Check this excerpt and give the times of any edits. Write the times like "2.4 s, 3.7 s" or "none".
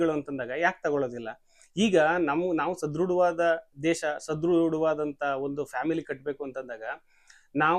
none